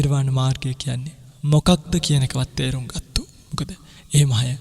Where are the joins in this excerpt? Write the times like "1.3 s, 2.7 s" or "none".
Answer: 3.7 s